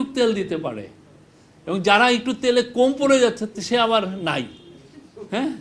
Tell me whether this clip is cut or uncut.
uncut